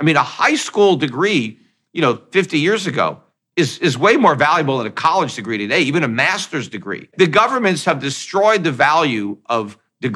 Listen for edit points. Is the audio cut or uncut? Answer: cut